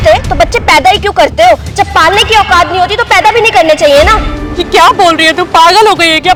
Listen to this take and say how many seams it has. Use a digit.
0